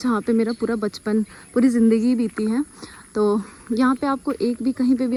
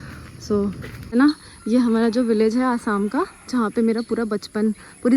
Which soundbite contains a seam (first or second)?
second